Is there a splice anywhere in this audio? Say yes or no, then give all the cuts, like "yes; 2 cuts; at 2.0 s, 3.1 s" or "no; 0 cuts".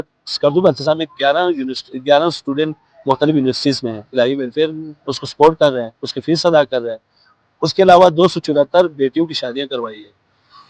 no; 0 cuts